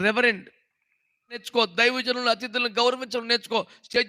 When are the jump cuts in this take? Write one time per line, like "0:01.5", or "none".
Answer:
0:01.5

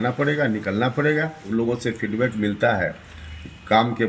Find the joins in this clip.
0:01.4

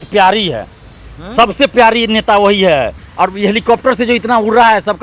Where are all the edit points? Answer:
0:03.0

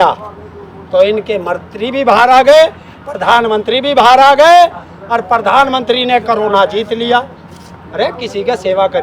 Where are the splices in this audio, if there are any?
none

